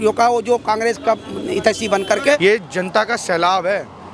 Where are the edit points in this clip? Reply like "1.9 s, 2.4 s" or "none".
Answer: 2.4 s